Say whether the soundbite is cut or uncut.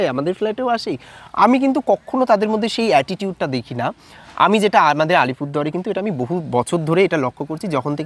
uncut